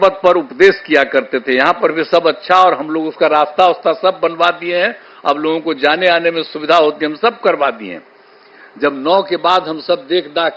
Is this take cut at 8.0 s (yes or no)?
no